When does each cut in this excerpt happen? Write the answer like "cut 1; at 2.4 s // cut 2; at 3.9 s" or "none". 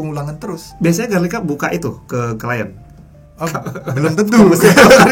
none